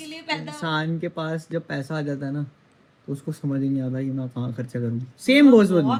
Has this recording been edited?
no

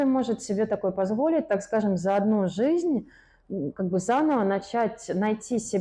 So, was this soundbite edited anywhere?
no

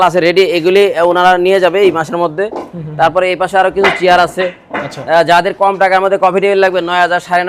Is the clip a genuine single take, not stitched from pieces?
yes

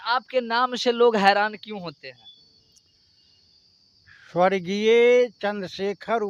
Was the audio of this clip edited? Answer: no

